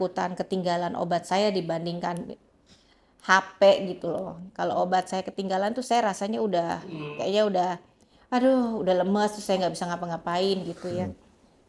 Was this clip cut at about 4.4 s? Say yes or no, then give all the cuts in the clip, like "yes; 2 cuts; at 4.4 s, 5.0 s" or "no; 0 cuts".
no; 0 cuts